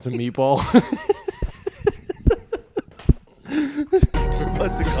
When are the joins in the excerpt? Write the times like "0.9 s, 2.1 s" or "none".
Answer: 4.1 s

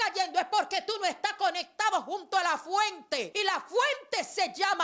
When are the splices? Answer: 3.3 s

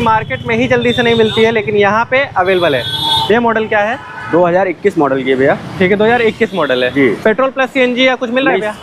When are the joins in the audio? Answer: none

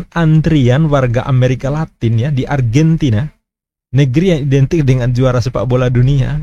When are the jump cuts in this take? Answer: none

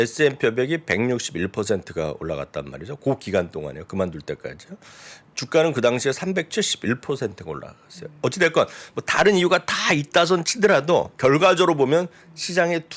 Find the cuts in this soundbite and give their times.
none

